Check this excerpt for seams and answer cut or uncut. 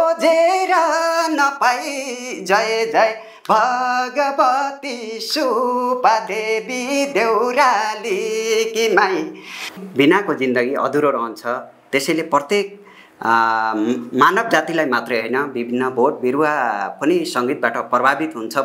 cut